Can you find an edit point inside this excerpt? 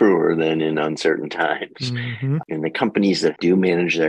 yes; 2 cuts; at 2.4 s, 3.4 s

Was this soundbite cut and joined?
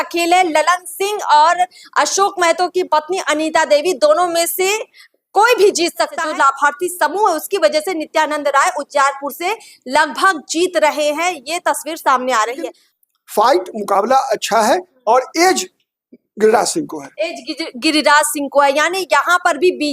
yes; 2 cuts; at 6.2 s, 12.8 s

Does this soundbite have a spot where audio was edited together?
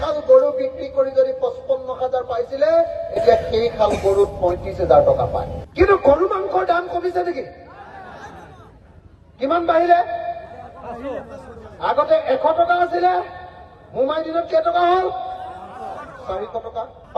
no; 0 cuts

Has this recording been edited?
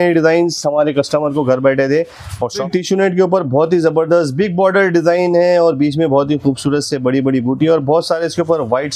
yes; 1 cut; at 2.6 s

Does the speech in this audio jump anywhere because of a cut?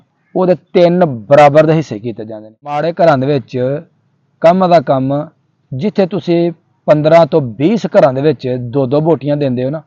yes; 1 cut; at 2.8 s

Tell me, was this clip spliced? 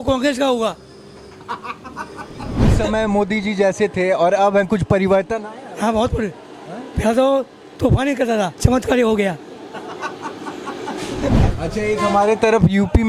yes; 3 cuts; at 2.7 s, 8.6 s, 11.4 s

